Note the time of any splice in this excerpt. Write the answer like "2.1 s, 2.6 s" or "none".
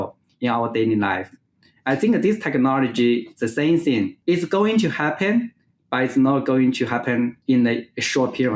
4.2 s, 7.4 s